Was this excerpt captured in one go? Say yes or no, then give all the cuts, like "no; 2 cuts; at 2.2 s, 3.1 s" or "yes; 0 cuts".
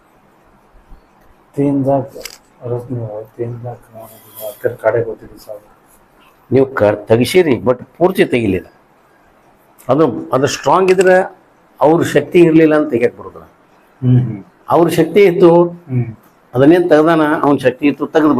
yes; 0 cuts